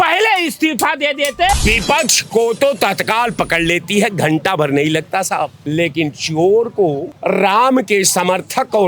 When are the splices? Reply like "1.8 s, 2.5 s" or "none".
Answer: 1.5 s, 5.6 s, 7.1 s